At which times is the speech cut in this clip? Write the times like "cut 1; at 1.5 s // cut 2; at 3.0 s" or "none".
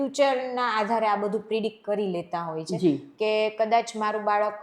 none